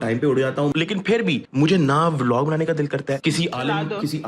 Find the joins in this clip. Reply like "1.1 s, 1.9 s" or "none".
0.7 s, 3.2 s

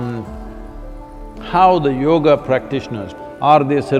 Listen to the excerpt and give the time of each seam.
3.0 s

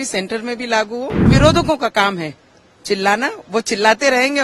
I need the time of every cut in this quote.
1.3 s

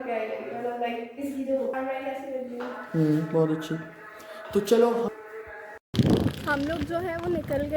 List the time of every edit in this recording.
1.7 s, 5.1 s

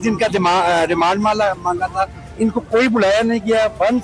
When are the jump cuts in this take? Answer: 2.2 s

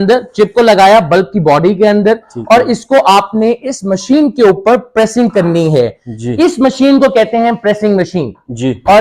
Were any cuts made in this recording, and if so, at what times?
none

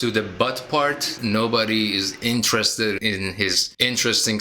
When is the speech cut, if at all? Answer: 1.1 s, 3.2 s

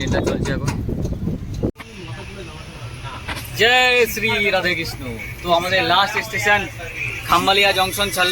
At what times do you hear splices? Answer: 1.7 s

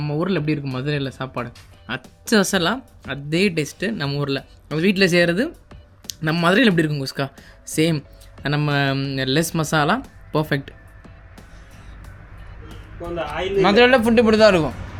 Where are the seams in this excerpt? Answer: none

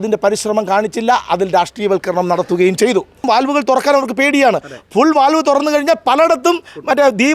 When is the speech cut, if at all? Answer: 3.2 s

